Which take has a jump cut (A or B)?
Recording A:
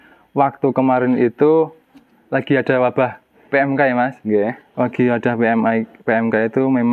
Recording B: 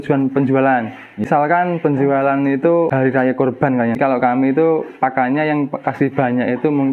B